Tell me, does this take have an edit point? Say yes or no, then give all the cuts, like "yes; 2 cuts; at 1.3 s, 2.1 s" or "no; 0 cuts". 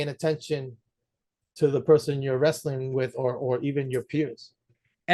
no; 0 cuts